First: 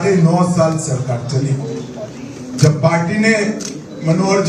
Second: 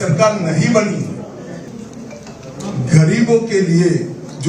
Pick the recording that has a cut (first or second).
second